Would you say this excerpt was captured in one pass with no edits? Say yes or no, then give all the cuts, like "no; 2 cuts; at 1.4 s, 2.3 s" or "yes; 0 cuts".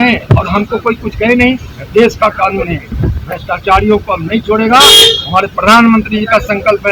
yes; 0 cuts